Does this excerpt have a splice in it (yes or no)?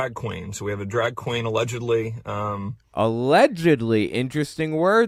no